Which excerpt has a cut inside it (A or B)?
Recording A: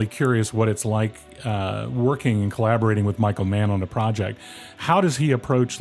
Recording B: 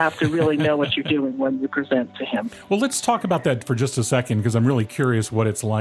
B